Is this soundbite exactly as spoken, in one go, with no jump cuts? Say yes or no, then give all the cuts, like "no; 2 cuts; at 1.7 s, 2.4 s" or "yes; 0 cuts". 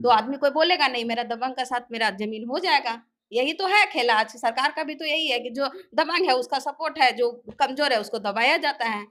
yes; 0 cuts